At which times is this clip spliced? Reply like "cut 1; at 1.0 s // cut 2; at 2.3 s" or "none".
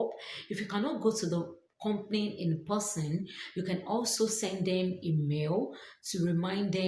none